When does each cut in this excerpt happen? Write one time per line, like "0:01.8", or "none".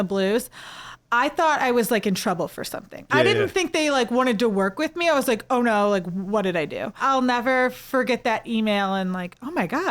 0:07.0